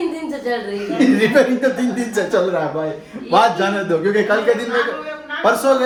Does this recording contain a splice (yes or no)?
no